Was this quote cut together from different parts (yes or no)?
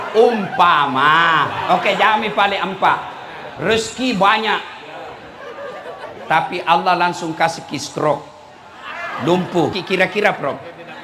yes